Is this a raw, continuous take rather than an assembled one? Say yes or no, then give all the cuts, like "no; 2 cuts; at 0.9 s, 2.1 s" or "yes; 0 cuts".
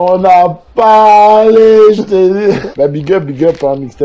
no; 1 cut; at 2.7 s